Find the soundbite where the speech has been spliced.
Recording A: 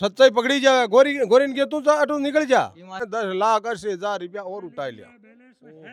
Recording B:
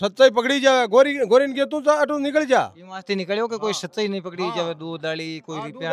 A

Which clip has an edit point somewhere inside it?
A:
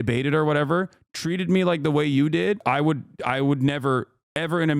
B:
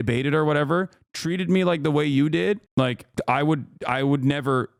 A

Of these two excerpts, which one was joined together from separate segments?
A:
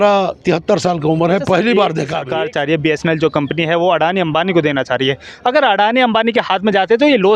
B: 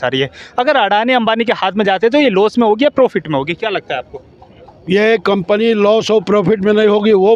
A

